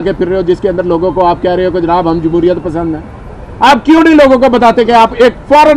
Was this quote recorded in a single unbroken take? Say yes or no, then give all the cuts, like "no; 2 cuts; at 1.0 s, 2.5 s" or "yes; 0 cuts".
yes; 0 cuts